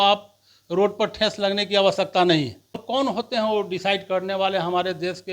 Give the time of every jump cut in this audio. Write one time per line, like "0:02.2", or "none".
0:02.8